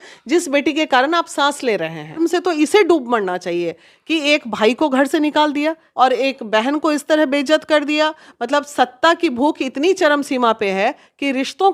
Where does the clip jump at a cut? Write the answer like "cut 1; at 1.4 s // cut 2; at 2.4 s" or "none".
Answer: cut 1; at 2.2 s // cut 2; at 5.8 s